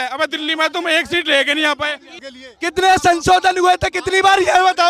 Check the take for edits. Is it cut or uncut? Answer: cut